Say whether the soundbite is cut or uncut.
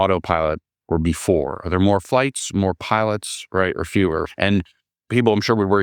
cut